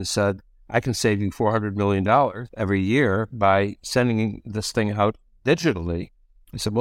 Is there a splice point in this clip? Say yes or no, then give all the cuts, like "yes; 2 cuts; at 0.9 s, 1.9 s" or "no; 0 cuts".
no; 0 cuts